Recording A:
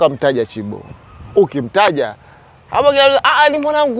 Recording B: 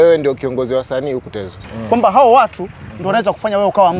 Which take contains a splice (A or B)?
B